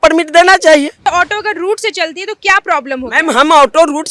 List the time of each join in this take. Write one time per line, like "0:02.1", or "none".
0:01.0